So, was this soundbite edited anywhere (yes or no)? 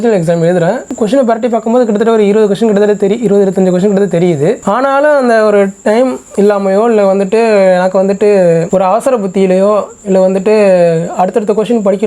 yes